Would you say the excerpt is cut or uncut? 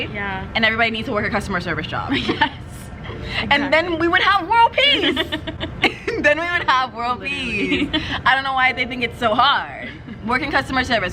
uncut